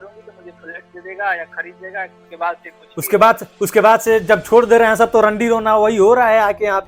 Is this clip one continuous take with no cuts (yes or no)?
no